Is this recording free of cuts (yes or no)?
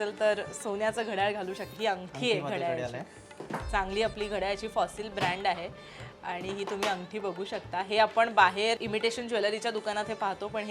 no